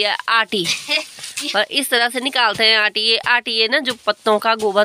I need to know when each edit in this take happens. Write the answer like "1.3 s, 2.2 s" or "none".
none